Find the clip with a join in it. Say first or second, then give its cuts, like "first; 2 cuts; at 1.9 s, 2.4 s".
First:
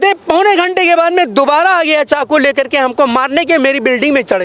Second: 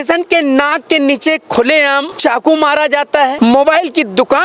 second; 2 cuts; at 2.1 s, 3.3 s